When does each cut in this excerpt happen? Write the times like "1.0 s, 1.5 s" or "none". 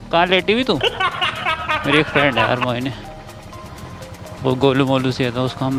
none